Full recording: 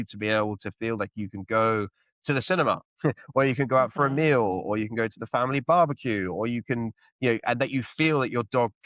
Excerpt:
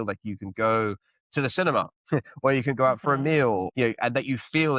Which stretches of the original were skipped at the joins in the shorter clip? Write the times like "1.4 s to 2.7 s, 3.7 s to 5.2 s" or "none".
4.6 s to 7.1 s

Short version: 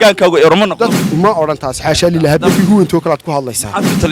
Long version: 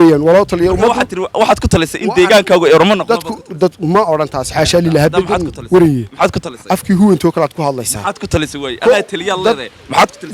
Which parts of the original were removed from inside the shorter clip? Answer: 3.4 s to 3.8 s, 5.3 s to 6.9 s

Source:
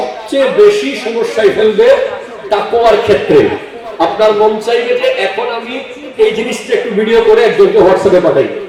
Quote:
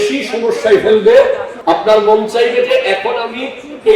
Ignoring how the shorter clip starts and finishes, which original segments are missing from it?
2.2 s to 3.8 s

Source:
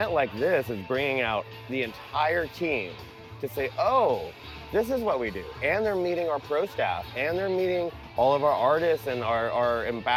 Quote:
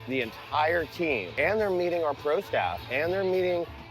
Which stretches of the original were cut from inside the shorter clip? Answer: 2.9 s to 5.5 s

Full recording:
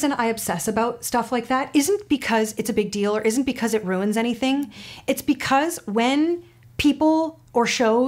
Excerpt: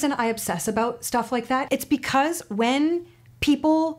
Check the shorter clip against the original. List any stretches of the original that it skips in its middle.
1.6 s to 5.0 s

